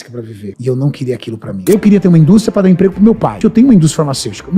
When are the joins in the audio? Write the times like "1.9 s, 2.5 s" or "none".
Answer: 1.6 s, 3.4 s